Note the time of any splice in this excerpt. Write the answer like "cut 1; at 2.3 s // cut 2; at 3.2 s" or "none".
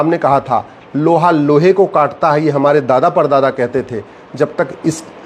none